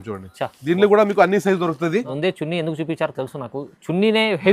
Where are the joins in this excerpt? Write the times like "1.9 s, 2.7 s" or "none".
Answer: 2.1 s